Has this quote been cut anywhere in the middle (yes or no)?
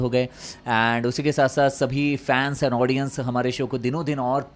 no